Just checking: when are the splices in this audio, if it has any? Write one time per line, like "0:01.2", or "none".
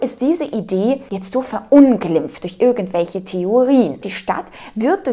0:01.1
0:04.1